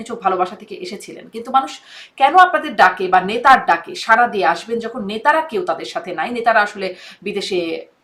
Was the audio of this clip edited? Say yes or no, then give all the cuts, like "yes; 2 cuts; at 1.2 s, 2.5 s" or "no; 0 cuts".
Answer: no; 0 cuts